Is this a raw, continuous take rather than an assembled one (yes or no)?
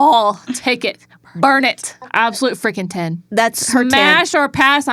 no